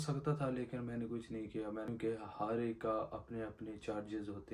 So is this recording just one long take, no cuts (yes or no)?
no